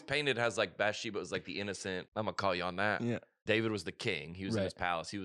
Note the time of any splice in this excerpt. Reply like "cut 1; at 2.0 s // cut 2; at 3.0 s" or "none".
cut 1; at 2.0 s // cut 2; at 3.3 s